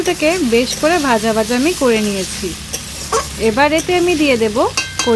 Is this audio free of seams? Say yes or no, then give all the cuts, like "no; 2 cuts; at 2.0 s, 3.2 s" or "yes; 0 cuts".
yes; 0 cuts